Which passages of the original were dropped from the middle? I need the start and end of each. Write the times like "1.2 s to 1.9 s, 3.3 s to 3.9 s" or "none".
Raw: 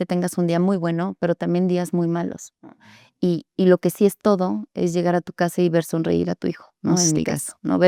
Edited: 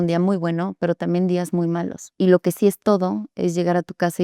2.5 s to 3.5 s